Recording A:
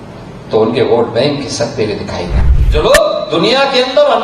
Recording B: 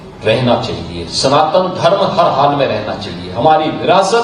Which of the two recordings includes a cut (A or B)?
A